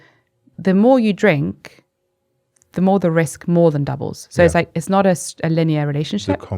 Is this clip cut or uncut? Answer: uncut